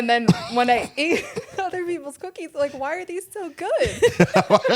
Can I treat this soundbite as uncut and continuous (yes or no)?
yes